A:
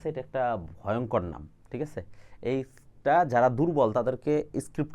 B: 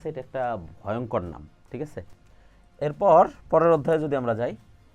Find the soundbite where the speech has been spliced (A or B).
B